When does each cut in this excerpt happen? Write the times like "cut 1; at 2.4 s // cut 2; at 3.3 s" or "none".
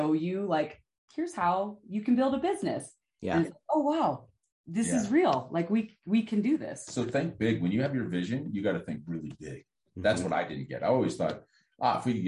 none